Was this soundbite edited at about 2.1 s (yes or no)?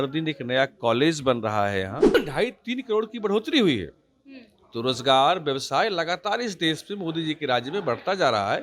yes